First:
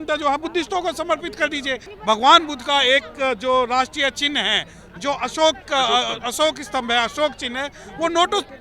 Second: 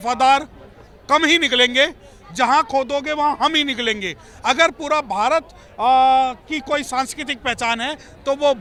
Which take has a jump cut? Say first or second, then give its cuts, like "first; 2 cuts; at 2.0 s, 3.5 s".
first; 1 cut; at 1.9 s